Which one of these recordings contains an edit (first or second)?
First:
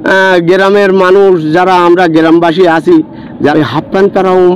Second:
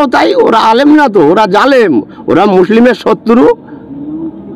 first